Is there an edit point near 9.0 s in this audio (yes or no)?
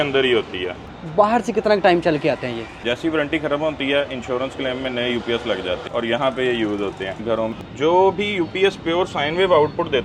no